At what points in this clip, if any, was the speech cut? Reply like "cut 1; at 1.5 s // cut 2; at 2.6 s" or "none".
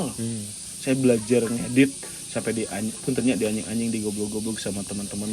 none